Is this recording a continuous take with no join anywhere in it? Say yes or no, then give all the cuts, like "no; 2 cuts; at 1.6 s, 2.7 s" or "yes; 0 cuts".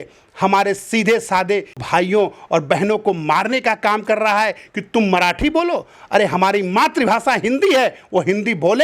no; 1 cut; at 1.8 s